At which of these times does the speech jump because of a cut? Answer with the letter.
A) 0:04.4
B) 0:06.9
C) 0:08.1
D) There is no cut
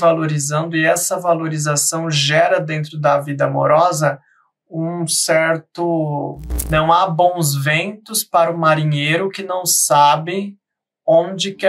B